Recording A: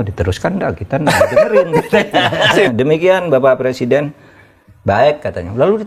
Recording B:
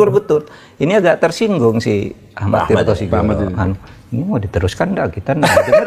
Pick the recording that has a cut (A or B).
A